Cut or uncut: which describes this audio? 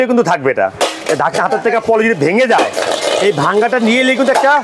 uncut